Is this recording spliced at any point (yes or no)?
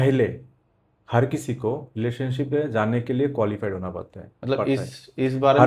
no